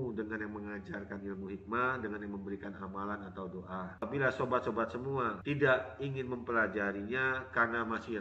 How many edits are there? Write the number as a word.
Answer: one